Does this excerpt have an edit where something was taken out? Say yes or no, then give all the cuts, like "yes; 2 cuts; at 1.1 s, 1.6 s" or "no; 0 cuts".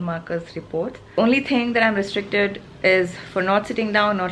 yes; 1 cut; at 1.2 s